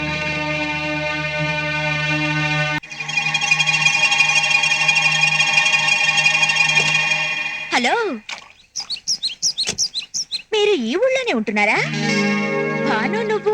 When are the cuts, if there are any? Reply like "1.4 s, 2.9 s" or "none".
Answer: 2.8 s